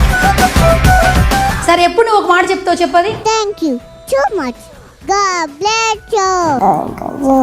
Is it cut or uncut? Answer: cut